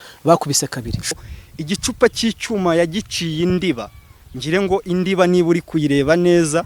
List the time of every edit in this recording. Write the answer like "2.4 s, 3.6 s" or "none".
1.1 s